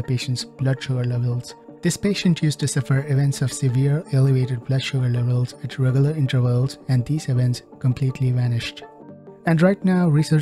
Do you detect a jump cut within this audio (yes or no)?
yes